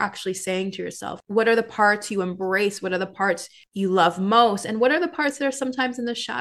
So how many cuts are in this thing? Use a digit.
2